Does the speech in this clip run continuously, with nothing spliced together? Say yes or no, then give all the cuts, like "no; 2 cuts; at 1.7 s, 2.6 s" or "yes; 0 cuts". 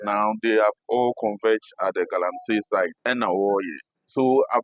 no; 1 cut; at 3.0 s